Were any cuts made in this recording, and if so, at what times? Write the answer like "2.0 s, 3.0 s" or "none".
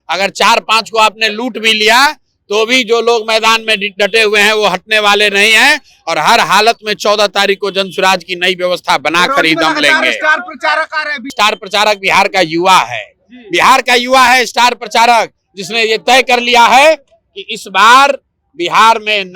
11.3 s